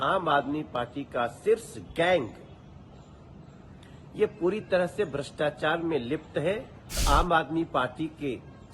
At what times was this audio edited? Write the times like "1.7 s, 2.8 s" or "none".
7.0 s